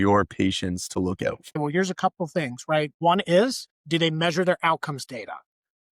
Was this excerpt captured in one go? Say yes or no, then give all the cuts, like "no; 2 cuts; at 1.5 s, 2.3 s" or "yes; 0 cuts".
no; 1 cut; at 1.6 s